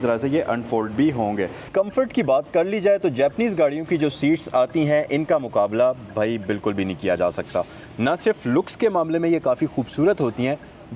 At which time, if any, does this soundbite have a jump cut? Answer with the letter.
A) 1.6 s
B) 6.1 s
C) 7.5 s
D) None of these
A